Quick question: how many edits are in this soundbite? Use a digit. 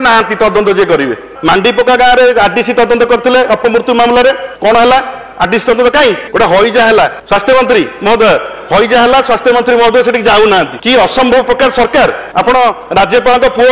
6